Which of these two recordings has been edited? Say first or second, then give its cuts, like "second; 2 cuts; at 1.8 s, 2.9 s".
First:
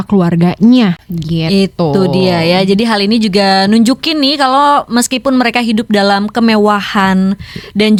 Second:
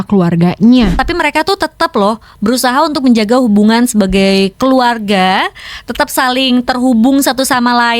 second; 1 cut; at 1.0 s